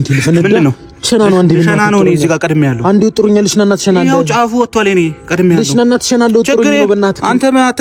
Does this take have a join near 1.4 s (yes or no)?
no